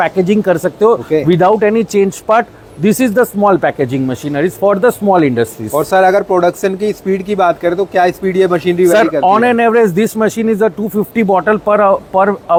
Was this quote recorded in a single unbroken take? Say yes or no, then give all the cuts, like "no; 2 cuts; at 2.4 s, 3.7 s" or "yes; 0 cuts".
yes; 0 cuts